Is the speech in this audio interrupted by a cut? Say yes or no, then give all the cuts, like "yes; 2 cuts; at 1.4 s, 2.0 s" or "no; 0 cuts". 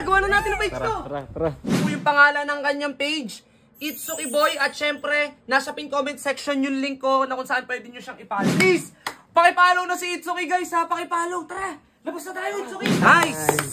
yes; 2 cuts; at 1.7 s, 8.5 s